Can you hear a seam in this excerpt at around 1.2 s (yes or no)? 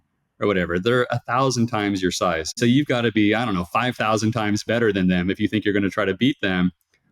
no